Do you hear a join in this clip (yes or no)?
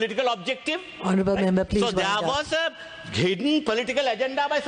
no